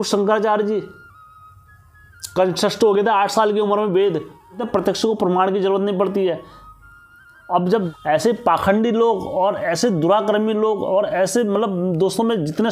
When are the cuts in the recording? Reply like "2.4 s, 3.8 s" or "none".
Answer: 4.6 s, 7.9 s